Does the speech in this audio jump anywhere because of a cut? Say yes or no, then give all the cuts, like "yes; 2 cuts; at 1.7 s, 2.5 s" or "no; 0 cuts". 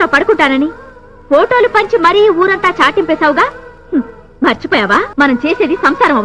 yes; 1 cut; at 5.1 s